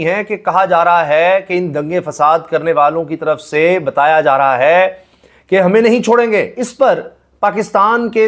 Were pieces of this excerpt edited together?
yes; 1 cut; at 6.6 s

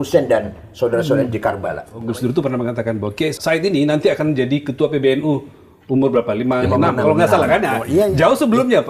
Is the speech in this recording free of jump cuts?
no; 2 cuts; at 1.9 s, 3.4 s

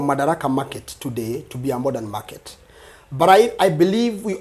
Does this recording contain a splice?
no; 0 cuts

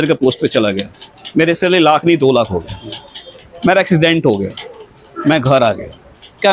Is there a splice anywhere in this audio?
no; 0 cuts

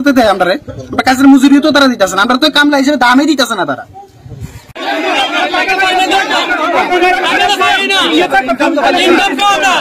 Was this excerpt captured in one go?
yes; 0 cuts

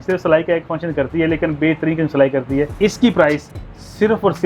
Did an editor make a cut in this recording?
yes; 1 cut; at 2.7 s

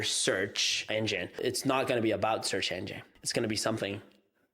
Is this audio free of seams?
no; 2 cuts; at 1.3 s, 3.1 s

